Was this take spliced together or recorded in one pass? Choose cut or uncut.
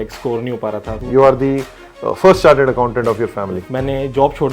cut